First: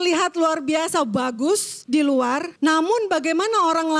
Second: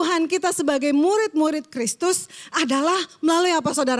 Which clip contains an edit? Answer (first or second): first